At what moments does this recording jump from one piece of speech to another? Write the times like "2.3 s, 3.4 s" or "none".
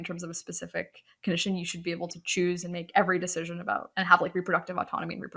none